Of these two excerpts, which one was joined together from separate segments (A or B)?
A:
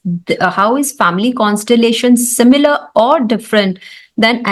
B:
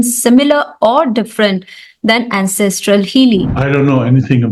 B